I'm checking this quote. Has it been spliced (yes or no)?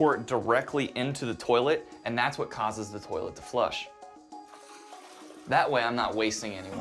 no